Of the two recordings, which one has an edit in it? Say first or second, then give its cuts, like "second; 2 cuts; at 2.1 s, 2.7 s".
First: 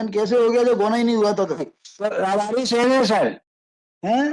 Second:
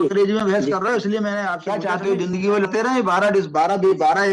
second; 2 cuts; at 1.6 s, 2.7 s